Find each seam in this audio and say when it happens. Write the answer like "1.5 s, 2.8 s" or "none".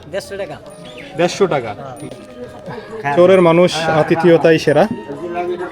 2.1 s